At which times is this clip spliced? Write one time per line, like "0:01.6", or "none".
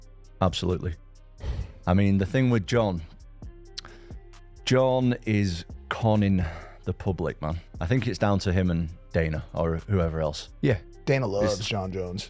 0:07.7